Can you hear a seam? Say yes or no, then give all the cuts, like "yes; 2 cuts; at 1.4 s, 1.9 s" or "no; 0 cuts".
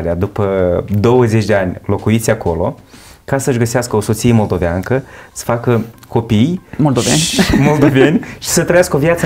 no; 0 cuts